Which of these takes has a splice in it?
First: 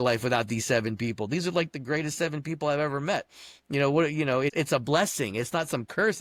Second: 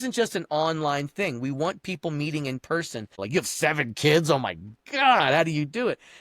second; 1 cut; at 3.2 s

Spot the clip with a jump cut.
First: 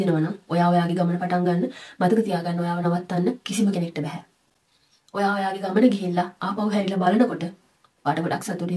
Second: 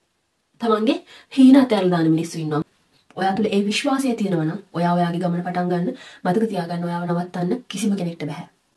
second; 1 cut; at 2.7 s

